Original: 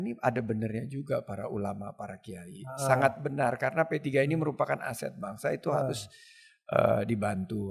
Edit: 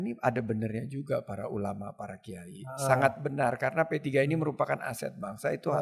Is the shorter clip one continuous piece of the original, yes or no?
yes